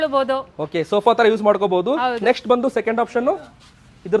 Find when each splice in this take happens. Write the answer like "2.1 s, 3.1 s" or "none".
none

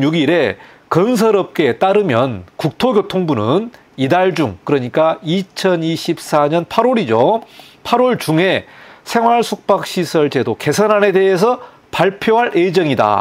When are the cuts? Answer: none

